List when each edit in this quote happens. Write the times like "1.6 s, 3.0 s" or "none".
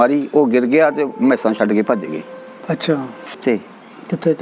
3.4 s